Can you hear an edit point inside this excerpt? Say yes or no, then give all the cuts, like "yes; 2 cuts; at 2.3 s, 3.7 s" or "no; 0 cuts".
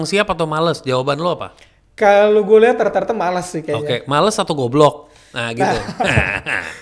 no; 0 cuts